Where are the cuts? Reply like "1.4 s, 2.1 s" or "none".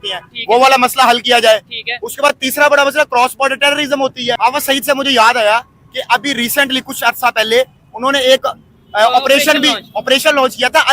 4.4 s

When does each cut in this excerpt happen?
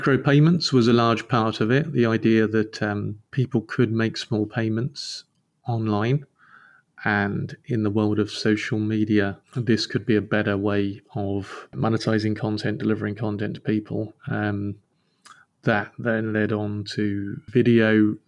3.2 s, 9.5 s, 11.7 s, 17.4 s

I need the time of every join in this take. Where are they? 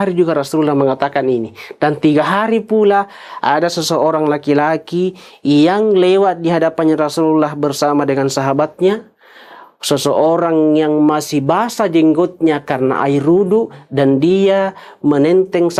none

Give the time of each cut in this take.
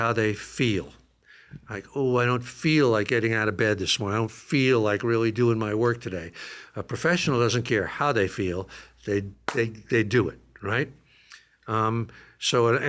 none

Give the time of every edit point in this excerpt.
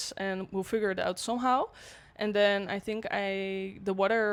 none

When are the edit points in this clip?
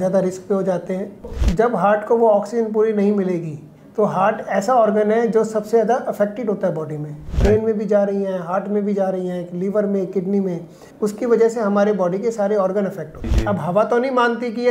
1.4 s, 7.3 s, 10.8 s, 13.3 s

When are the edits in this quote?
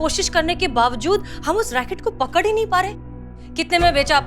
3.2 s

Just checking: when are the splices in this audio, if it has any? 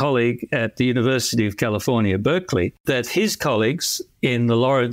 2.8 s

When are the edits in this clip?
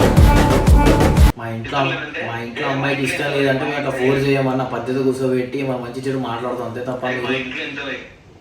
1.3 s

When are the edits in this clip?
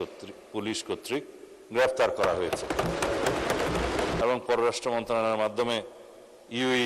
4.2 s

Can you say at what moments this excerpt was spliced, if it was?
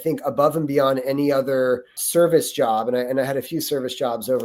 2.0 s

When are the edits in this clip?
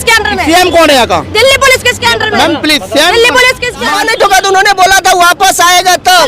3.9 s

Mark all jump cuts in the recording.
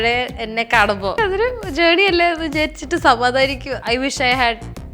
1.1 s, 3.7 s

